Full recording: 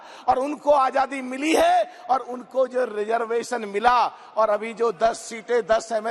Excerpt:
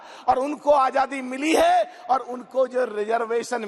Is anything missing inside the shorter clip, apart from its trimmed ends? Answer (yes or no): no